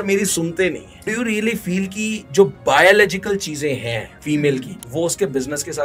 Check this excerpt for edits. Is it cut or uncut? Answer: cut